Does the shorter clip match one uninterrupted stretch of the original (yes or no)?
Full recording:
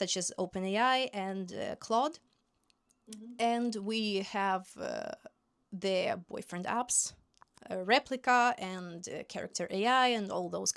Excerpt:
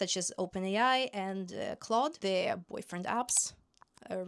no